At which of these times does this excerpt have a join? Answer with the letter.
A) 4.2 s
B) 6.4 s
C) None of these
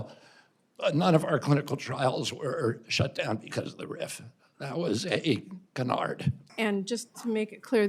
B